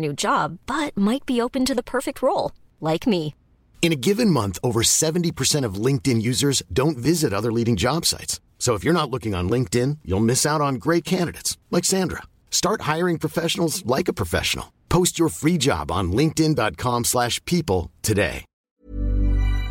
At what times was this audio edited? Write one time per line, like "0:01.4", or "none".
0:18.7